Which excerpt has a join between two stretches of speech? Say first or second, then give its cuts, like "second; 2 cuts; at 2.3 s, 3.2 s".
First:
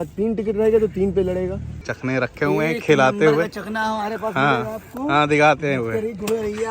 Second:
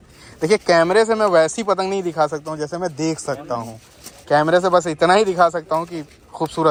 first; 1 cut; at 1.9 s